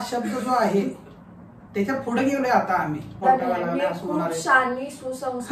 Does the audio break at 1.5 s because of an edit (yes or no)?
no